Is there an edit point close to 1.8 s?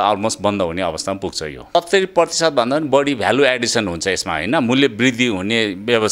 yes; 1 cut; at 1.8 s

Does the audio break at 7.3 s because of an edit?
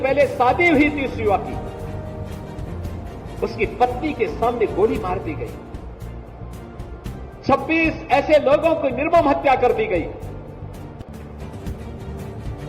no; 2 cuts; at 1.5 s, 3.3 s

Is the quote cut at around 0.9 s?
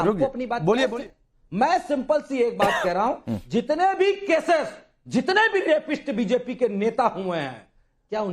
yes; 1 cut; at 0.9 s

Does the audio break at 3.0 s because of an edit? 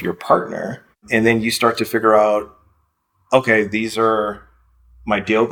no; 1 cut; at 1.0 s

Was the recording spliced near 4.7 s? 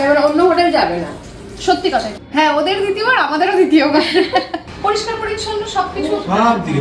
yes; 1 cut; at 4.7 s

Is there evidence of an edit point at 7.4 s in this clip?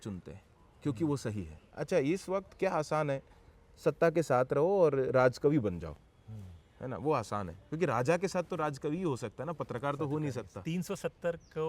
no; 2 cuts; at 1.7 s, 10.5 s

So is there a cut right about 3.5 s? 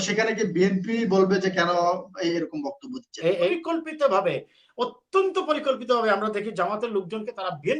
yes; 1 cut; at 3.5 s

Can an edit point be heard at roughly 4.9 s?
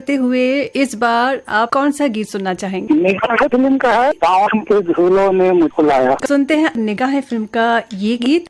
no; 1 cut; at 6.8 s

